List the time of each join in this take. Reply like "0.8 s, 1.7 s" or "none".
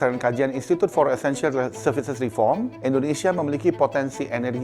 2.7 s